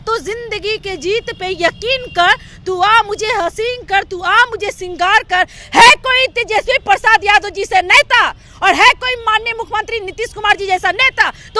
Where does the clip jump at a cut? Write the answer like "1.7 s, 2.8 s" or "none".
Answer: none